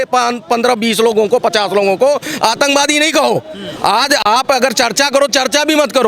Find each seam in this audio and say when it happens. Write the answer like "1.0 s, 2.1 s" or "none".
none